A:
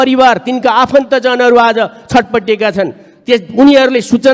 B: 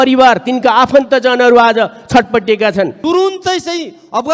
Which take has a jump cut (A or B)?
B